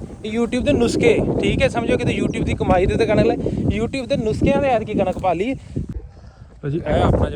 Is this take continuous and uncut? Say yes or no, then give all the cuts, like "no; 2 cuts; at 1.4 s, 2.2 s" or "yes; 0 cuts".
no; 1 cut; at 5.9 s